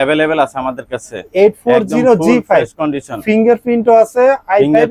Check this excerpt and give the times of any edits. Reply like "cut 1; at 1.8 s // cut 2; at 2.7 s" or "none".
none